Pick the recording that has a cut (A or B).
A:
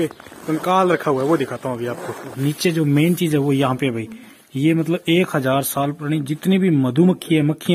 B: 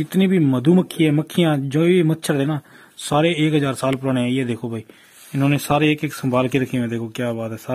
A